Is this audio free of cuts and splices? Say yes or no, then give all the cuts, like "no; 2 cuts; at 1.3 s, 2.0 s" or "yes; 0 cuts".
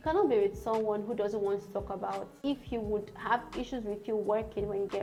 yes; 0 cuts